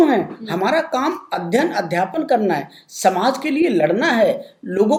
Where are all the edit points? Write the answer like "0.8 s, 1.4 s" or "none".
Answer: none